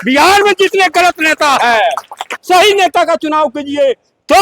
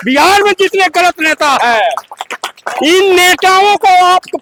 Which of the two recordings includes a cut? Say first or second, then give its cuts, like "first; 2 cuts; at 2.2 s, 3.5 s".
first; 1 cut; at 2.3 s